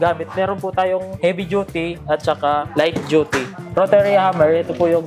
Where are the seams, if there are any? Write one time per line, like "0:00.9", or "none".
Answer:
0:01.1
0:02.7
0:03.7

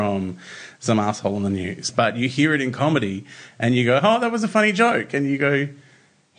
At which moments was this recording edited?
0:01.8

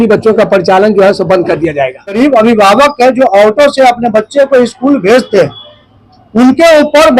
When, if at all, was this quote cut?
0:02.1

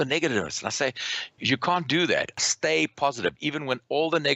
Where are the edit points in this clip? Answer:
0:01.3
0:02.4

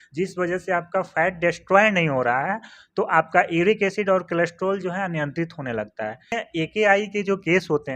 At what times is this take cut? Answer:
0:06.3

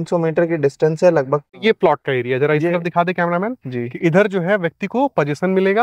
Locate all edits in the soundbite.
0:01.6

